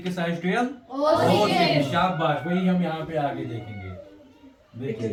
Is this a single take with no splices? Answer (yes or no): yes